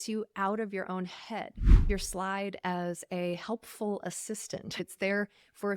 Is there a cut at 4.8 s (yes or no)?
yes